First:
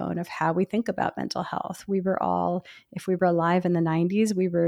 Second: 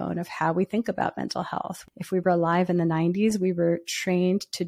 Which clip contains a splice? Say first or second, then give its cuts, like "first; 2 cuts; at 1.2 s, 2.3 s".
second; 1 cut; at 1.8 s